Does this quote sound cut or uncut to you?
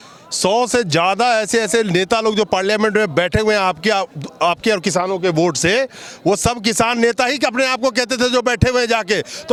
uncut